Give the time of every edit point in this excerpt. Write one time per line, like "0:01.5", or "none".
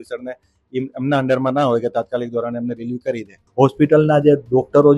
0:03.4